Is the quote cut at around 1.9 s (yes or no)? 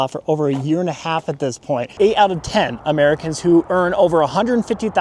yes